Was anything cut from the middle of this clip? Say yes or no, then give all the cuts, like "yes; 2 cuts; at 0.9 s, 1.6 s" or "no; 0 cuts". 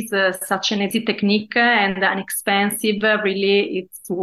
yes; 1 cut; at 0.9 s